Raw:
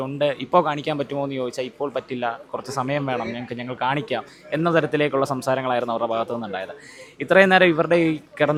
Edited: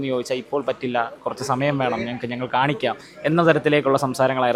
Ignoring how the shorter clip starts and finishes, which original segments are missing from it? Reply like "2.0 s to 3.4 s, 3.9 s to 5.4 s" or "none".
none

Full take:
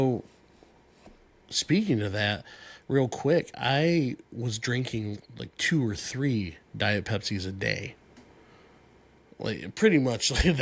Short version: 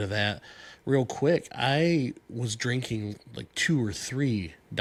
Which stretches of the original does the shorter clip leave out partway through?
none

